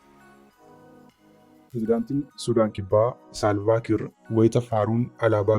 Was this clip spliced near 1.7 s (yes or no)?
yes